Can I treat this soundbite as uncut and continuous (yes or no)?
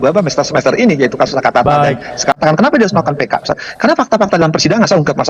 no